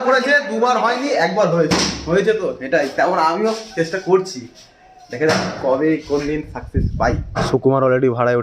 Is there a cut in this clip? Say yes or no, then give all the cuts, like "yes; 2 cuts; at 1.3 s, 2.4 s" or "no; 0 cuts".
yes; 1 cut; at 7.4 s